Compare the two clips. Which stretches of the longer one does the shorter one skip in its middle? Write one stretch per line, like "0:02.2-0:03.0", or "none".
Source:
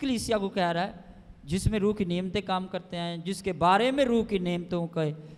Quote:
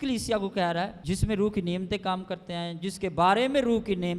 0:01.0-0:01.4